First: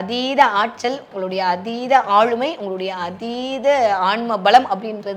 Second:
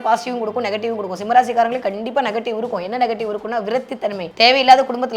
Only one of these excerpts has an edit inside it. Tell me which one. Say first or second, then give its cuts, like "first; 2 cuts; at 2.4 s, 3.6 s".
second; 1 cut; at 4.2 s